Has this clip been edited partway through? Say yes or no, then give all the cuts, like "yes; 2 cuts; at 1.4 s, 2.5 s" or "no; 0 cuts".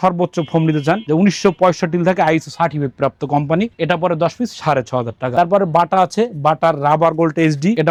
no; 0 cuts